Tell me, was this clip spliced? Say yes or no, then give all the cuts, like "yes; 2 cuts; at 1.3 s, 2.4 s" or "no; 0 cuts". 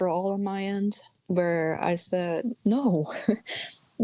yes; 2 cuts; at 1.1 s, 2.5 s